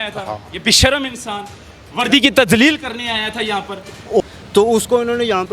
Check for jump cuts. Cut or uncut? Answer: cut